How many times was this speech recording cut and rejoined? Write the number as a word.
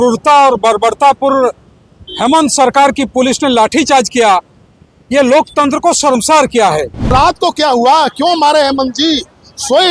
one